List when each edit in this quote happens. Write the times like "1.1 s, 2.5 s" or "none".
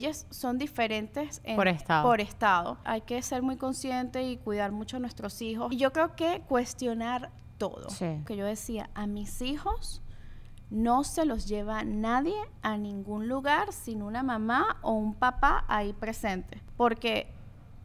2.8 s, 5.7 s, 8.3 s, 16.6 s

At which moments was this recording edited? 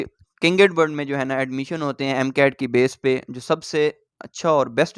none

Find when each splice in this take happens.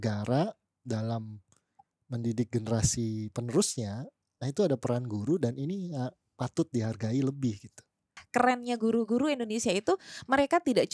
8.2 s

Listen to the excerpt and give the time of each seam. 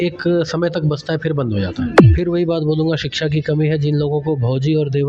2.0 s

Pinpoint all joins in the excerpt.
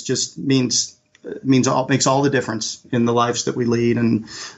2.8 s

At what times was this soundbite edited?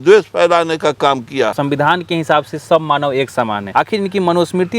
1.6 s, 3.6 s

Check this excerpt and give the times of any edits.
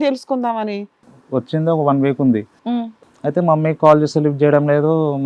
1.0 s, 2.8 s

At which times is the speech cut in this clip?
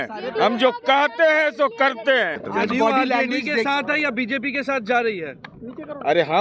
2.4 s

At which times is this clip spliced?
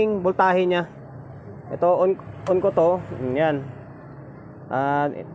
none

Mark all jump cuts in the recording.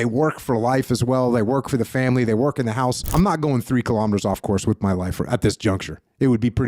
3.1 s

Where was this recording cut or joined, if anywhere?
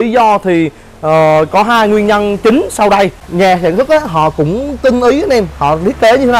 3.2 s

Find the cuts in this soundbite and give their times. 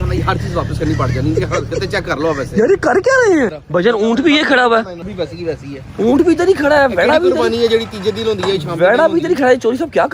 3.6 s, 5.1 s

